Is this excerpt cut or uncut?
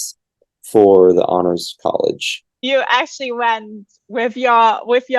cut